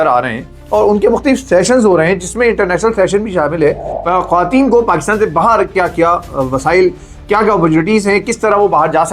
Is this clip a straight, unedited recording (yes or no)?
no